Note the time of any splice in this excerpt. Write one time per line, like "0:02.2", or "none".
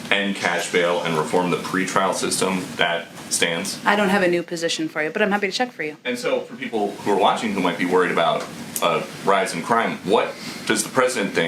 none